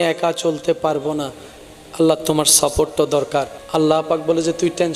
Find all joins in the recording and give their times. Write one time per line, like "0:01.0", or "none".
0:03.6